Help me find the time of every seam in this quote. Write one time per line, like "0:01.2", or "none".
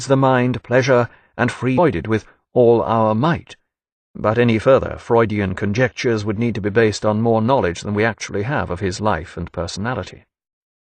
none